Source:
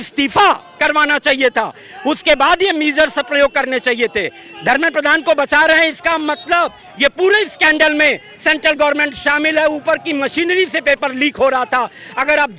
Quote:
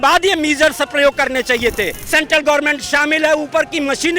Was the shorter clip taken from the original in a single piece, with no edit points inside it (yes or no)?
no